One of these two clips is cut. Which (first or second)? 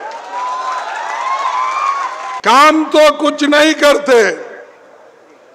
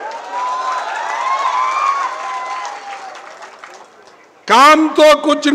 first